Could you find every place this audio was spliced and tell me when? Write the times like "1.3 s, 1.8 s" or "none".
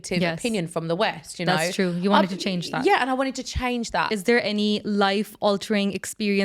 4.1 s